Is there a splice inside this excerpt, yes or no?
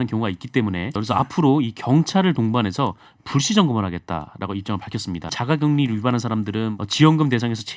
yes